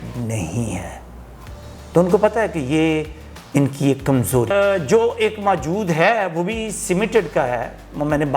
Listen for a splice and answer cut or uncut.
cut